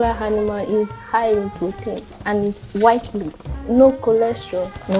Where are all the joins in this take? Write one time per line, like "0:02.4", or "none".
none